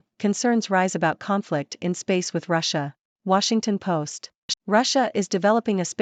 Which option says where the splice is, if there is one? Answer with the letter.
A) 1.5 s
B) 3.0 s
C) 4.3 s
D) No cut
D